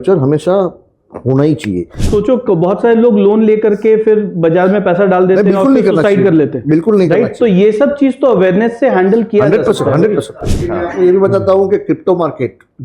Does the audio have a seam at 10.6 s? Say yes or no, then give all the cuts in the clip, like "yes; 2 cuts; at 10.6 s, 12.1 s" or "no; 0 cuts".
yes; 2 cuts; at 2.0 s, 10.6 s